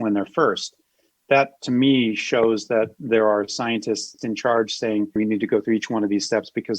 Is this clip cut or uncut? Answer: cut